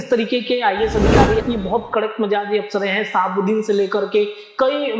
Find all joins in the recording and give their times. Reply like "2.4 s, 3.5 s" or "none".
1.4 s